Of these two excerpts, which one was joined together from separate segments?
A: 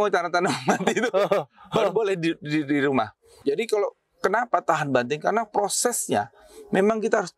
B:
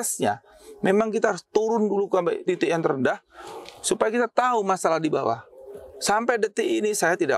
A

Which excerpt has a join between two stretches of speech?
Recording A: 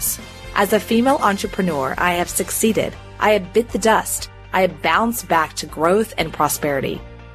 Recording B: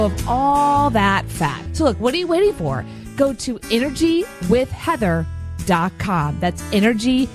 B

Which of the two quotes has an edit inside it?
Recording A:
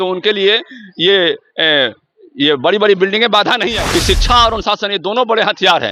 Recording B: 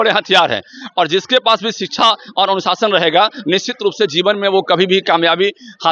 A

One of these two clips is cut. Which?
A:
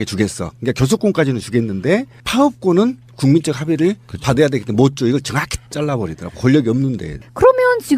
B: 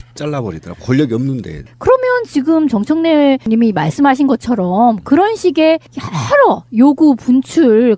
A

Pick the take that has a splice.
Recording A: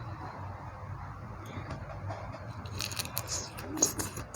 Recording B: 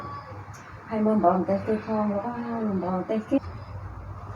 B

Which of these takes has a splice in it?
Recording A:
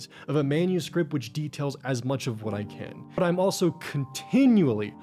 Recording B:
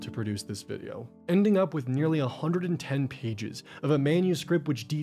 A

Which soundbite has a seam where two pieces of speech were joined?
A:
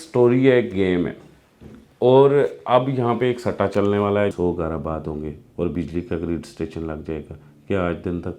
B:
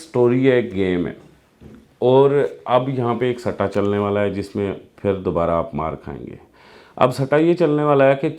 A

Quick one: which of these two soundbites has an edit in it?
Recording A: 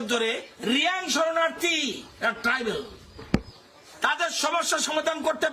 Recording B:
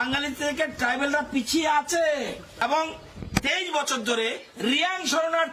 B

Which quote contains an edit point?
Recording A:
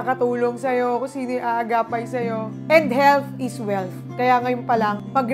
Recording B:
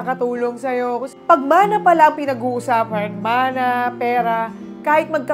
B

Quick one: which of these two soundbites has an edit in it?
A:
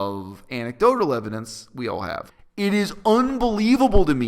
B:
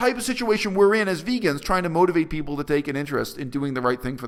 A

